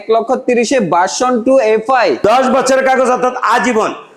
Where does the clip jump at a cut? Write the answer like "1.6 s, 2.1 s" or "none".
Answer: 2.2 s